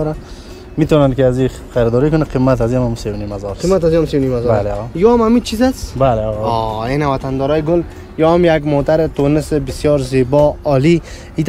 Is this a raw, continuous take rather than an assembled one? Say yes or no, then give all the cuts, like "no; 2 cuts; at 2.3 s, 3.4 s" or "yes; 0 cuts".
yes; 0 cuts